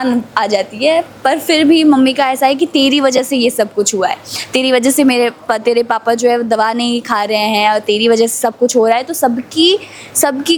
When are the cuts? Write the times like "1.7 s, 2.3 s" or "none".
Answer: none